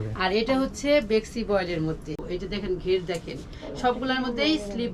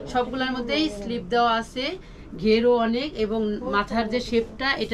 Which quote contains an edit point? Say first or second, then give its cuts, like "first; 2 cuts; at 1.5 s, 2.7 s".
first; 1 cut; at 2.2 s